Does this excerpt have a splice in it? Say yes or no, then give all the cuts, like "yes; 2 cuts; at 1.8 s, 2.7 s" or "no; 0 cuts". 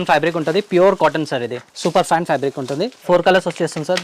no; 0 cuts